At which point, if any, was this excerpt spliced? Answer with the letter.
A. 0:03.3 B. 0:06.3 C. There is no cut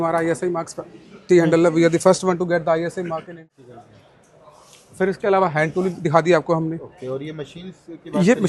A